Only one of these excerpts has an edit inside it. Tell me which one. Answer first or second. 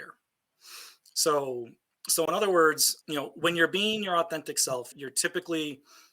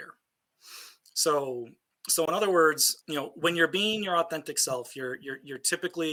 first